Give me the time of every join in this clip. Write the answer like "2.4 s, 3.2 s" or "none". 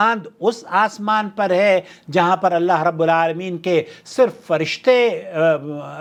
none